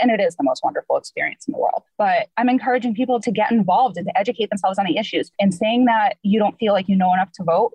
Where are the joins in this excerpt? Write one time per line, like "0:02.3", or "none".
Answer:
0:02.0
0:03.2
0:05.3
0:06.2